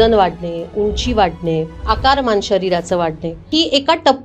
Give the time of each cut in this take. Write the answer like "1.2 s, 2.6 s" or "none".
1.8 s, 3.5 s